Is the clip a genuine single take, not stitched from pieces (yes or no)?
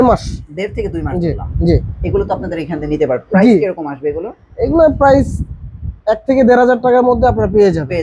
yes